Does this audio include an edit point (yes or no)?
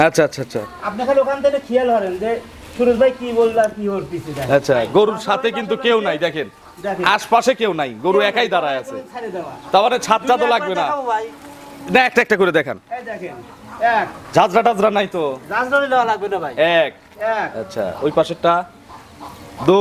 no